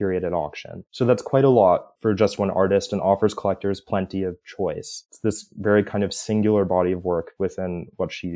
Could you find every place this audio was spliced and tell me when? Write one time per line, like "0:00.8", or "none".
0:01.9
0:05.0